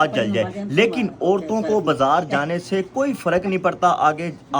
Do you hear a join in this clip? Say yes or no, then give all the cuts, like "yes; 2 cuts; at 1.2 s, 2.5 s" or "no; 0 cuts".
no; 0 cuts